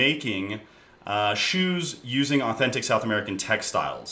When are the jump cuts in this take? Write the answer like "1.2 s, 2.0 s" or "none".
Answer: none